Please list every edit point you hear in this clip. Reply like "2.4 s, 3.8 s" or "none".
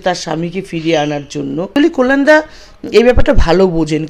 1.7 s